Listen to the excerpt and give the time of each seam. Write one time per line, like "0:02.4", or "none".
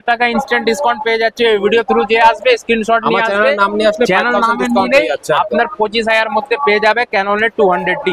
none